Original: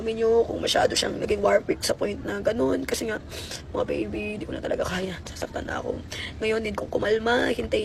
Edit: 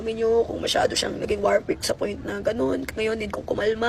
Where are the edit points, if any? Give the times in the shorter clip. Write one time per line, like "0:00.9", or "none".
0:02.8